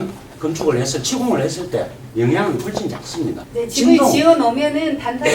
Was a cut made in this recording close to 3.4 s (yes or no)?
yes